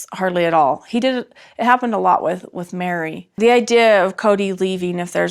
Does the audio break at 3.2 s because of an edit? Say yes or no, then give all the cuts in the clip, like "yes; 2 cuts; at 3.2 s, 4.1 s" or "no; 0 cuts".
yes; 1 cut; at 3.2 s